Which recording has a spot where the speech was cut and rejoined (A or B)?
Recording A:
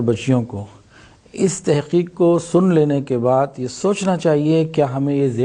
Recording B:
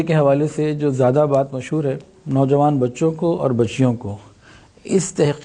B